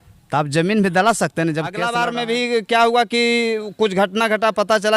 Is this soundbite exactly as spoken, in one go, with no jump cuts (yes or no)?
no